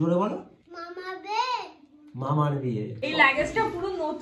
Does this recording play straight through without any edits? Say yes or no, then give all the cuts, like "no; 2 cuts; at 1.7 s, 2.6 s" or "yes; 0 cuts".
no; 1 cut; at 3.0 s